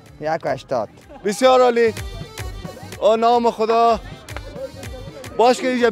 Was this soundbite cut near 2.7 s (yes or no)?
no